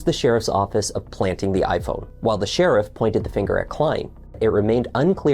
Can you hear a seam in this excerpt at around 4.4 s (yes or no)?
yes